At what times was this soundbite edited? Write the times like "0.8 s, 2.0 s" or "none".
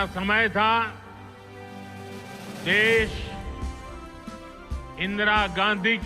0.9 s, 2.7 s, 3.1 s, 5.0 s

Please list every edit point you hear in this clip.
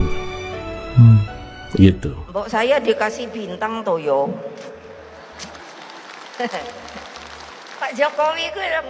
2.1 s

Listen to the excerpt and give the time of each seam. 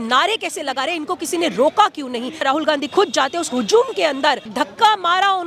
2.4 s, 4.5 s

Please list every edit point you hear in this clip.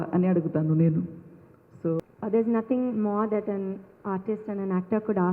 2.0 s

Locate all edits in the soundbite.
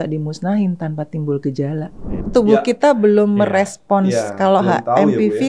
2.2 s

